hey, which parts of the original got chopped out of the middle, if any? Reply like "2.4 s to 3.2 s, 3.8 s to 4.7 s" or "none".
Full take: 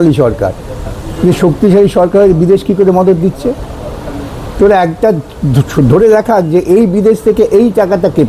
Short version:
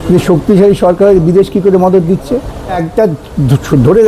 4.0 s to 4.9 s